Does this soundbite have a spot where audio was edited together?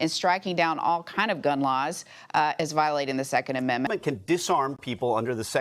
yes; 1 cut; at 3.9 s

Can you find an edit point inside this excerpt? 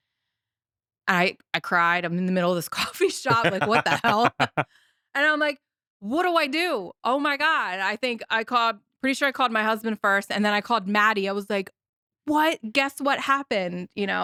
no; 0 cuts

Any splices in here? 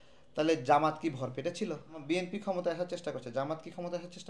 yes; 1 cut; at 2.0 s

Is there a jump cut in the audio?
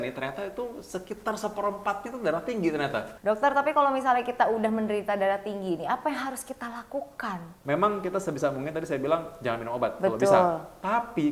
yes; 2 cuts; at 3.1 s, 7.6 s

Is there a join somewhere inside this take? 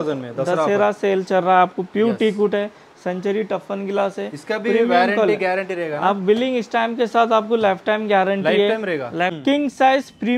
yes; 1 cut; at 9.4 s

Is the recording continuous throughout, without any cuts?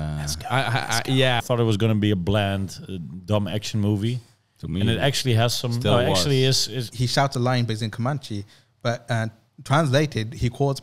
no; 2 cuts; at 1.4 s, 6.9 s

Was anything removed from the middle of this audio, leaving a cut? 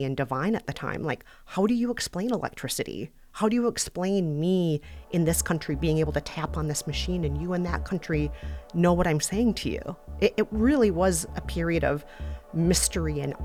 no; 0 cuts

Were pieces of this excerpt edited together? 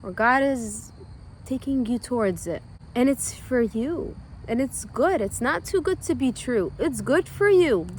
yes; 1 cut; at 2.7 s

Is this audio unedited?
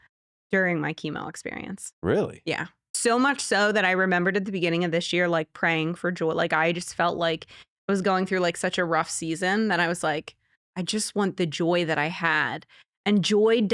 no; 1 cut; at 2.9 s

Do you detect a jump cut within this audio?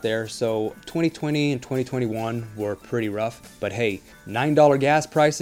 yes; 2 cuts; at 3.4 s, 4.1 s

